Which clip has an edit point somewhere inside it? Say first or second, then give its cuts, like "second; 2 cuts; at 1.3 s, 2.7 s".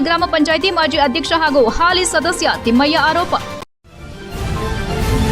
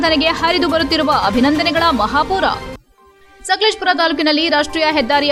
first; 1 cut; at 3.5 s